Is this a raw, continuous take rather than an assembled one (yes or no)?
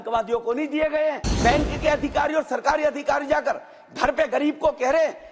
no